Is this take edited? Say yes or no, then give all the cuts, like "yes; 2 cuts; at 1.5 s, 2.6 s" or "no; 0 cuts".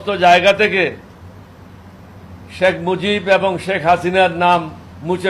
no; 0 cuts